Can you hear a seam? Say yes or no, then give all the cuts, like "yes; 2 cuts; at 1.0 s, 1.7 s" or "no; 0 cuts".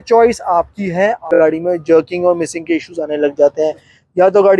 yes; 1 cut; at 1.3 s